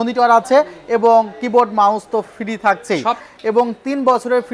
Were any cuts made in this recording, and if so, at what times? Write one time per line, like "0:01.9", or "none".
0:03.3